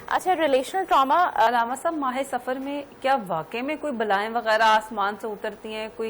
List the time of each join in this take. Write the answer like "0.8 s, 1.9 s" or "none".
1.5 s